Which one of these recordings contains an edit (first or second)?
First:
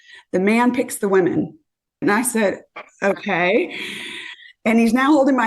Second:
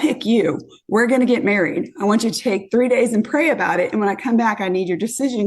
first